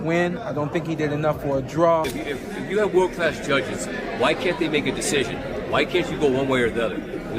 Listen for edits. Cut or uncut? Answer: cut